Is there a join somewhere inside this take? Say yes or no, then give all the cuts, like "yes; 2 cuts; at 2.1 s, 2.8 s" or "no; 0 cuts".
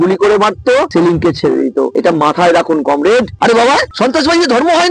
yes; 3 cuts; at 0.9 s, 1.9 s, 3.3 s